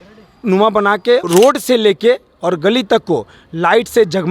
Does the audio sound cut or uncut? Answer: cut